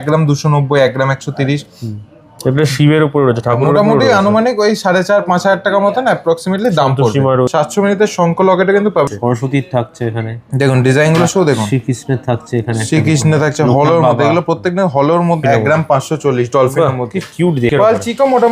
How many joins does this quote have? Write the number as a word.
four